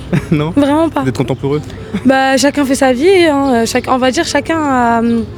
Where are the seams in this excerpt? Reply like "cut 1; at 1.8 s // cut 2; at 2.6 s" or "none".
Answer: none